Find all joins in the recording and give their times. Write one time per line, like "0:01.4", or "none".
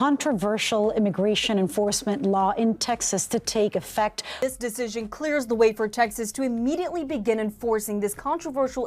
0:04.2

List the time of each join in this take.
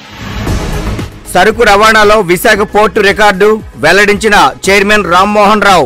0:01.1

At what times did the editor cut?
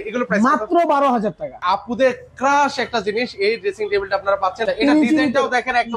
0:01.5
0:04.6

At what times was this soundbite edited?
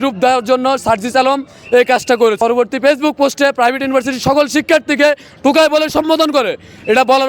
0:02.4

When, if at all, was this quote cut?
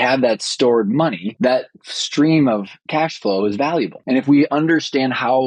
0:01.3
0:02.8
0:04.0

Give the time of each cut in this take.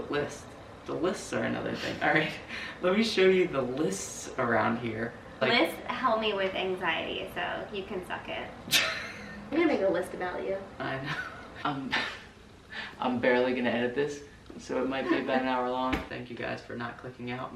0:05.3
0:09.5
0:11.5
0:16.1

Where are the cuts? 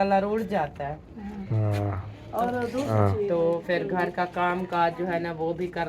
0:02.9

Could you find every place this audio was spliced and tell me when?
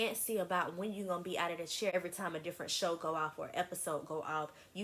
0:01.9

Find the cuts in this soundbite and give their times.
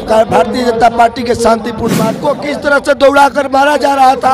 0:02.1

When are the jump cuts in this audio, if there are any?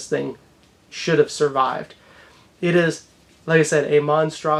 none

